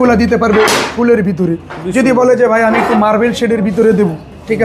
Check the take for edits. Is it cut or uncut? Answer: uncut